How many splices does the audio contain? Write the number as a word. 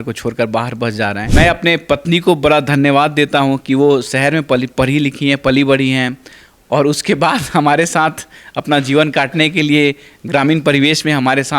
one